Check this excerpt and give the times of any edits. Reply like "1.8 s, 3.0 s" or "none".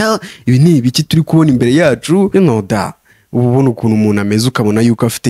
2.3 s